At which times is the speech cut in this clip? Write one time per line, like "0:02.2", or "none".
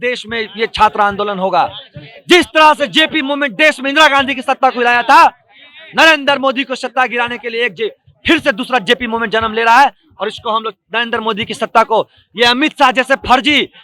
none